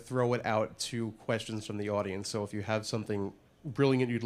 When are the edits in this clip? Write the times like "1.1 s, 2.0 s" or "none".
none